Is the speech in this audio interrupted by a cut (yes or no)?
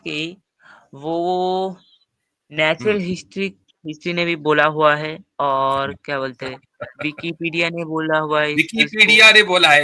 no